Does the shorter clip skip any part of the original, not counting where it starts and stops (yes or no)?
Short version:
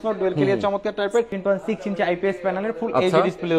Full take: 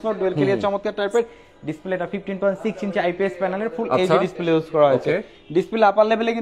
yes